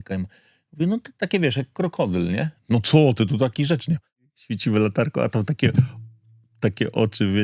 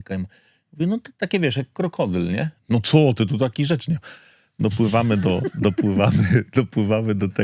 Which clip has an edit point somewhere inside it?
first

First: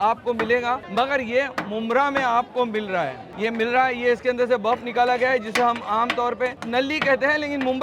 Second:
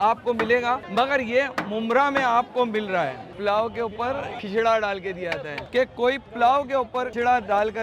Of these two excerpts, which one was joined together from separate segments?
second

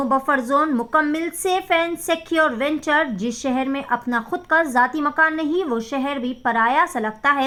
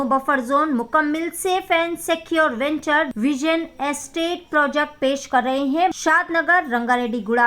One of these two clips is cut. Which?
second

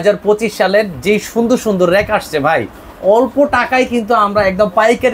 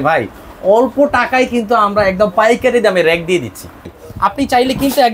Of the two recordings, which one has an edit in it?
second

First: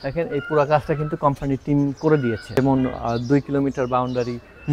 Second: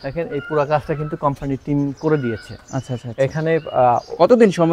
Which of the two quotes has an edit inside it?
first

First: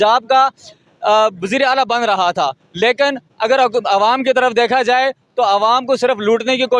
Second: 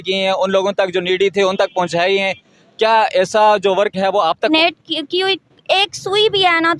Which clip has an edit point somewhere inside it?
second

